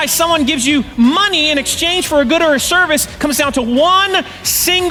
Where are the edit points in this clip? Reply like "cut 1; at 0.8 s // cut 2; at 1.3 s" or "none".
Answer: none